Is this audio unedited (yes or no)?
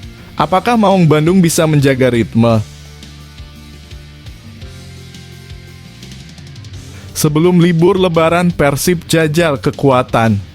no